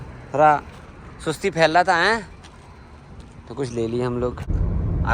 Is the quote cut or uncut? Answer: uncut